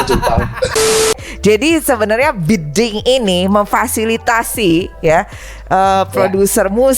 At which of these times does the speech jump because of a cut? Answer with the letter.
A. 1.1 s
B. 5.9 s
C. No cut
A